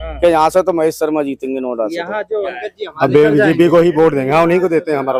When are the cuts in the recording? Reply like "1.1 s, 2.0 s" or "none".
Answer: 2.6 s